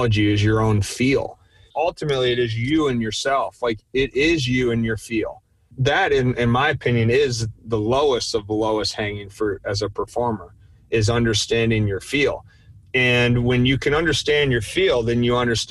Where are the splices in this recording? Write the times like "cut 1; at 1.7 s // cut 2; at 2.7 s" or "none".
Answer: cut 1; at 1.7 s // cut 2; at 5.7 s